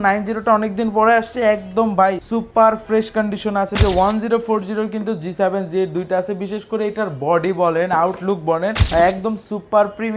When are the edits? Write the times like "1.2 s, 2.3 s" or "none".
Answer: 2.2 s, 3.8 s, 8.8 s

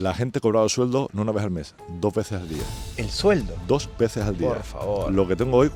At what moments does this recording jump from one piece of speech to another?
none

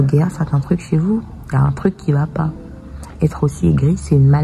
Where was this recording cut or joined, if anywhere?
none

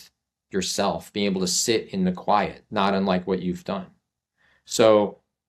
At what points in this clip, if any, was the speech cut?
none

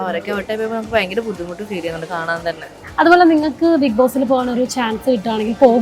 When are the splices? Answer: 2.7 s

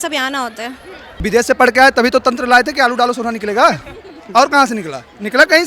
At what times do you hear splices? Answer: 1.2 s

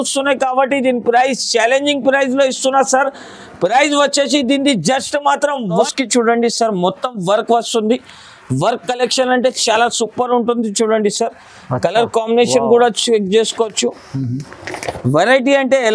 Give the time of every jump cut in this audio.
5.8 s

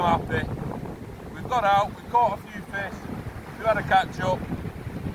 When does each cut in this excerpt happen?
none

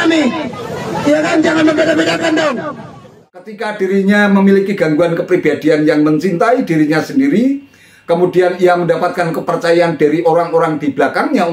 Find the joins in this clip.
3.6 s

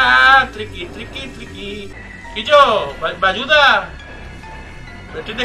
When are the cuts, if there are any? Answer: 1.9 s

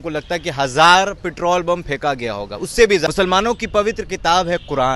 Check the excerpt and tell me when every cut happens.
3.1 s

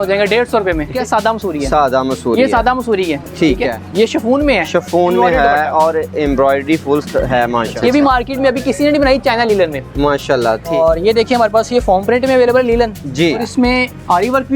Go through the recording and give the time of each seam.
0.9 s, 3.8 s, 7.8 s, 10.7 s, 13.4 s

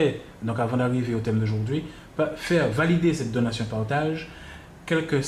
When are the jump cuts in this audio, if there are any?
none

